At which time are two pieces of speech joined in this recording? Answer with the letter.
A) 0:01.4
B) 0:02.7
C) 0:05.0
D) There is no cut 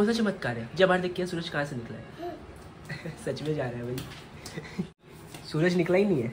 D